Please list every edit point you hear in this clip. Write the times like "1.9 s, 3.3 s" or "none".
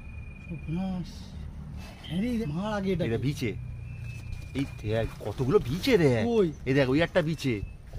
2.4 s